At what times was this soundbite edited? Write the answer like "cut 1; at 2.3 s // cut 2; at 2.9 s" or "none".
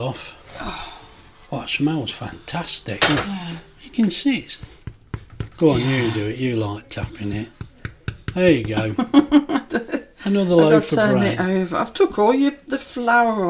none